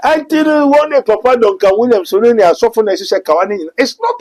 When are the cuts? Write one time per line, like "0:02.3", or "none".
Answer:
none